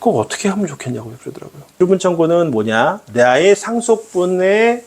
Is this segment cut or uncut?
cut